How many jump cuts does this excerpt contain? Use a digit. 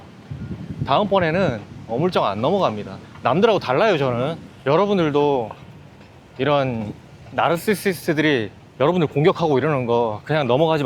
1